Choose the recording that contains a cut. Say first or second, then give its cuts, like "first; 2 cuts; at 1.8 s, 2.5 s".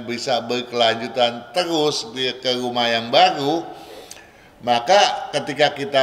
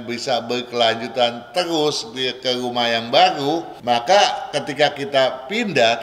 second; 1 cut; at 3.7 s